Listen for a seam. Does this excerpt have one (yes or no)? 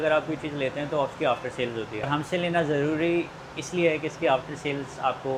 no